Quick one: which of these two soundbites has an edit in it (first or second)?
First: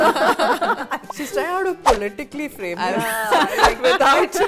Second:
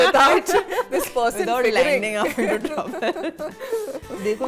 first